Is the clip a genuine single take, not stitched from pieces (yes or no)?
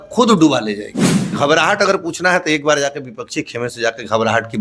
no